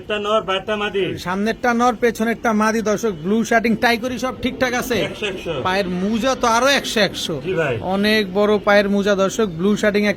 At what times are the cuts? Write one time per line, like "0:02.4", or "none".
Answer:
none